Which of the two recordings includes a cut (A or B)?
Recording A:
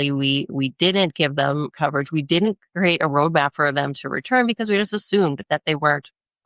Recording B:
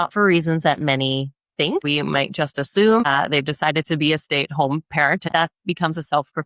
B